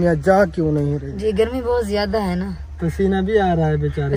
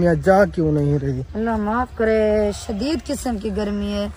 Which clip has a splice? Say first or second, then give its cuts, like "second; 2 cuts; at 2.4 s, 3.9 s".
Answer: first; 1 cut; at 1.1 s